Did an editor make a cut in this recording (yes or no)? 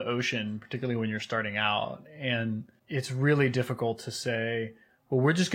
yes